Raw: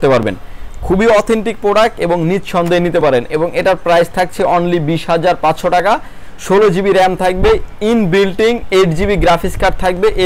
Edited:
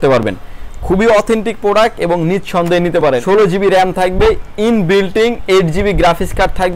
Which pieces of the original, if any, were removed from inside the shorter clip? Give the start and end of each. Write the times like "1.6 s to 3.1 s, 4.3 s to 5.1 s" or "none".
3.2 s to 6.5 s